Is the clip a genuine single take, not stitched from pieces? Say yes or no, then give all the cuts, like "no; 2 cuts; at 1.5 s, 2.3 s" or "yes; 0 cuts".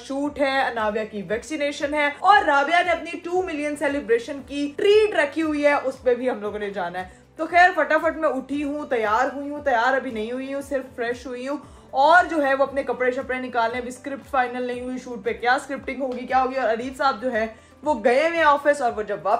yes; 0 cuts